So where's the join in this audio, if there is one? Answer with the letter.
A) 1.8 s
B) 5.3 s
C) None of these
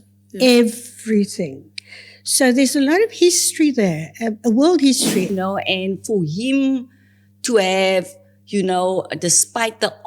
B